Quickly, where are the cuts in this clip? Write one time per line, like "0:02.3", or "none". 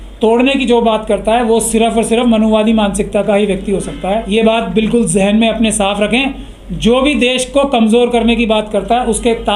0:04.2